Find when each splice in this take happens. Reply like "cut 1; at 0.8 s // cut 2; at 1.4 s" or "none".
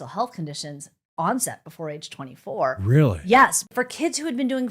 cut 1; at 3.6 s